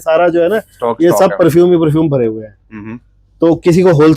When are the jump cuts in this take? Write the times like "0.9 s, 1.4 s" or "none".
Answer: none

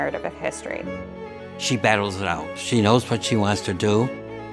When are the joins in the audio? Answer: 1.2 s, 2.5 s

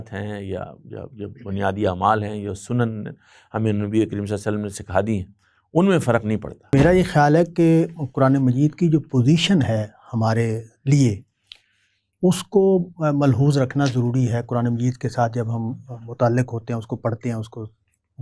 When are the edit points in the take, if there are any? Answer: 6.7 s

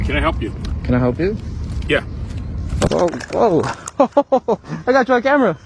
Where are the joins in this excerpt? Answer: 2.9 s

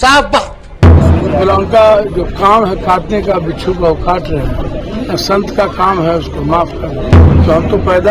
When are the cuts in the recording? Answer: 1.0 s, 4.8 s, 7.3 s

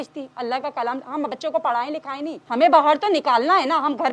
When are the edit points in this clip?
2.4 s

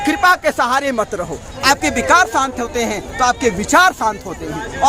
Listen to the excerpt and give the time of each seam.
1.5 s

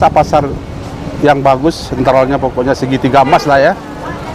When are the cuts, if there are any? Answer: none

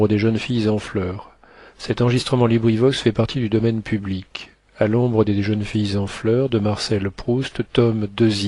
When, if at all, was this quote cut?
none

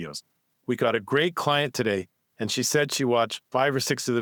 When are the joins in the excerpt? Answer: none

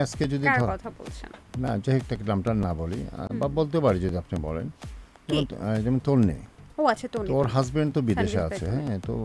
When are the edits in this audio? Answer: none

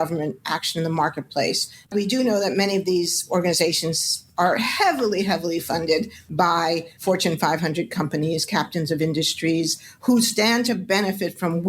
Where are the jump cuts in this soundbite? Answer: 1.9 s

